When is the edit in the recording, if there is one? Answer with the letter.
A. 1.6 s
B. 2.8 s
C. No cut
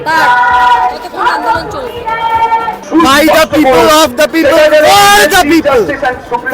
B